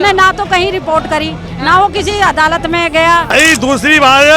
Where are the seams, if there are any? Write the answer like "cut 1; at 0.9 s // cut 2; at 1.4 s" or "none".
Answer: cut 1; at 3.3 s